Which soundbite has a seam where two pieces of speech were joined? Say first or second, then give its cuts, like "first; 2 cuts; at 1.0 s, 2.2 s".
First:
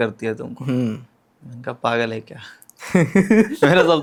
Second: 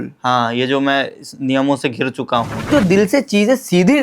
second; 1 cut; at 2.7 s